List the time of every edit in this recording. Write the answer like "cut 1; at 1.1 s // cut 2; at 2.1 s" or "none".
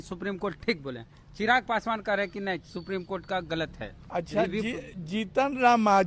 none